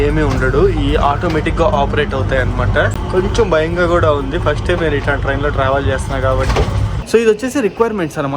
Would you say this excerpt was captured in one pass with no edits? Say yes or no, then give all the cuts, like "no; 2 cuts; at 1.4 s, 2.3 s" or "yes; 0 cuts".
no; 2 cuts; at 3.0 s, 6.9 s